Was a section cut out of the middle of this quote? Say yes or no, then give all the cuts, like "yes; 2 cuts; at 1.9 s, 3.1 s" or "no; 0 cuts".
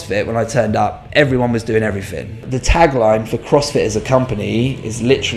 yes; 1 cut; at 2.4 s